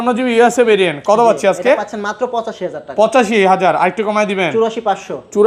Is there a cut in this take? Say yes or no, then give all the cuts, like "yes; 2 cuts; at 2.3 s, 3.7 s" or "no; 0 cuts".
no; 0 cuts